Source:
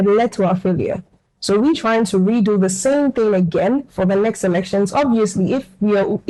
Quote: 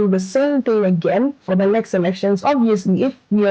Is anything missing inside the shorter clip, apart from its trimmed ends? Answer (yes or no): no